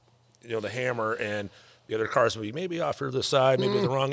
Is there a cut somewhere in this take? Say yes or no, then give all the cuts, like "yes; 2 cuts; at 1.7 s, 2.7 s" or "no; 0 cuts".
no; 0 cuts